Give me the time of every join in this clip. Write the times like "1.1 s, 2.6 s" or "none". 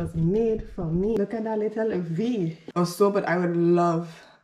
2.6 s